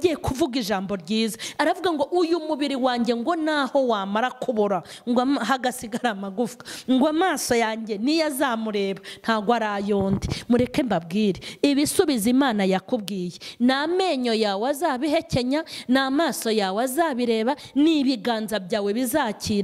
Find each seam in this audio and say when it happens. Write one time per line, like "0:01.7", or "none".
none